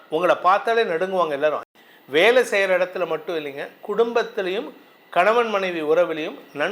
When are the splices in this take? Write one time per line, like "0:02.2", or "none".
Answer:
0:01.7